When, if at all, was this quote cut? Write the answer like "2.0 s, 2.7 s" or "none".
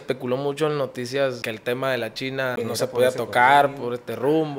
1.4 s, 2.5 s